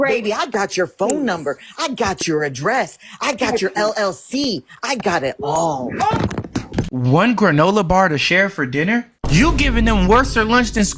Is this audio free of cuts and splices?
yes; 0 cuts

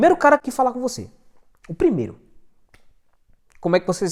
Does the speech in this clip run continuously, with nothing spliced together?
yes; 0 cuts

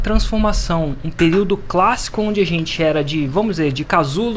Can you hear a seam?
no; 0 cuts

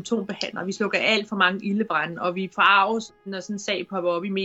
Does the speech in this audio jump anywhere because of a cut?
yes; 1 cut; at 3.1 s

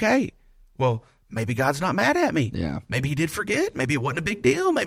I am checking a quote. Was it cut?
no; 0 cuts

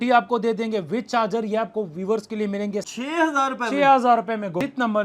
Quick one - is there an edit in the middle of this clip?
yes; 1 cut; at 2.9 s

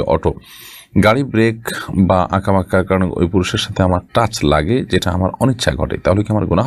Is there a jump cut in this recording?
no; 0 cuts

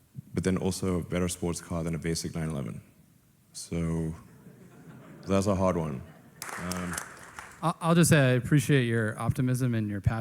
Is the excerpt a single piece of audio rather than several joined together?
no; 1 cut; at 6.5 s

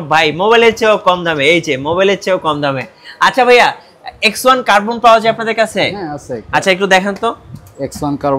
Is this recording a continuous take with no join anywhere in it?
yes; 0 cuts

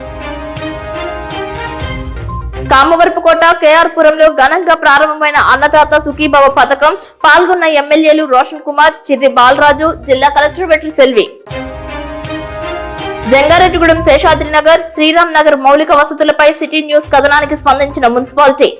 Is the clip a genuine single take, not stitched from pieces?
no; 1 cut; at 2.0 s

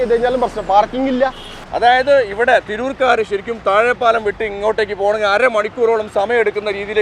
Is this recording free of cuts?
no; 1 cut; at 1.7 s

